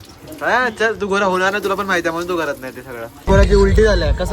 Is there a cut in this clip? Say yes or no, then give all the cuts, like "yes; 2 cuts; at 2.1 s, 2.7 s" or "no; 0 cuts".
yes; 1 cut; at 3.1 s